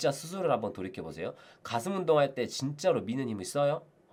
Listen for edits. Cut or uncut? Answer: uncut